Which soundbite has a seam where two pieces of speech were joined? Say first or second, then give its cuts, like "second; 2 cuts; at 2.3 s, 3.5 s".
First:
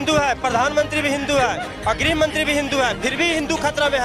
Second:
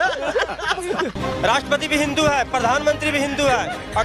second; 1 cut; at 1.2 s